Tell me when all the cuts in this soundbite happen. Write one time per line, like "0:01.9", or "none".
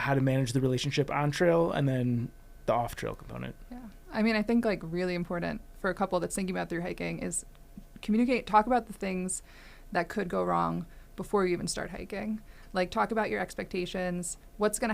0:05.7